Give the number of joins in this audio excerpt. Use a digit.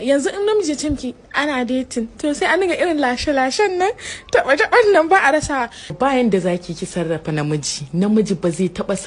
1